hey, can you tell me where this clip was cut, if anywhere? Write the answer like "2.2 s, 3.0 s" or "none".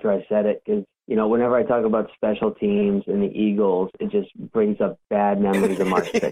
1.0 s

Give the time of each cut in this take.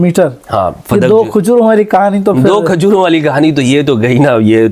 none

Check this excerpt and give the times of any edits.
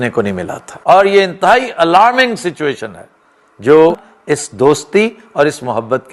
0.9 s, 4.1 s

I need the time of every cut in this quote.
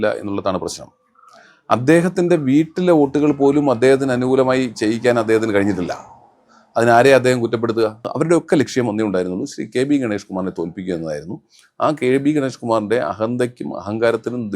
8.1 s

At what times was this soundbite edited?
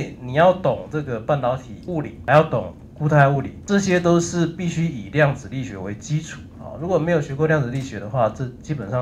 2.2 s, 3.6 s

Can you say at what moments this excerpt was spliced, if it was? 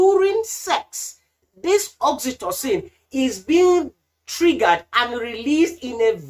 none

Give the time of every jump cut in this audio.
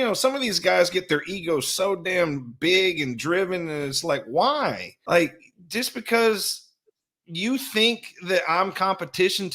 4.9 s

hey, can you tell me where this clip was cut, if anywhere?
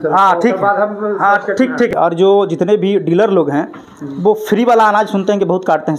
1.9 s

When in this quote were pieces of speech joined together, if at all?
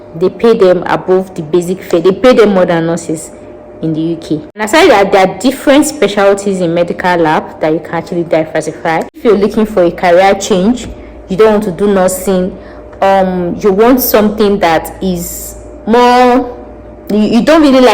4.7 s, 9.2 s

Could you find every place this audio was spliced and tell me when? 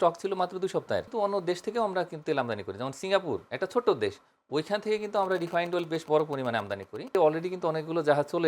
1.1 s, 7.1 s

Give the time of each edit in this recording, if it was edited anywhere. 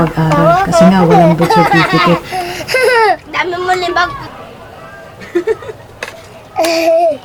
none

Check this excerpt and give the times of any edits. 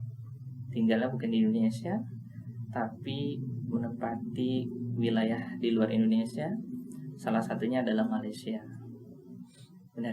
none

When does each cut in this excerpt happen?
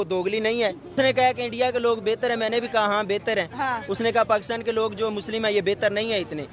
0.9 s

